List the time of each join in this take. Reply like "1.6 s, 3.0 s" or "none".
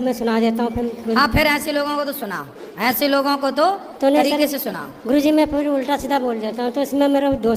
none